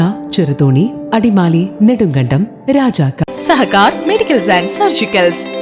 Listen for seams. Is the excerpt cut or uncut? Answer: uncut